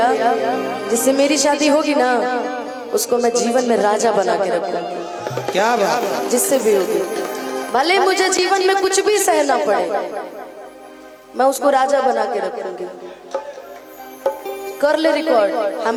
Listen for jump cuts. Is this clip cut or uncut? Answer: uncut